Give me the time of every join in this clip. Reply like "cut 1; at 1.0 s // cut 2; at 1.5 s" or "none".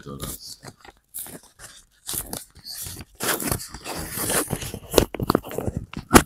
none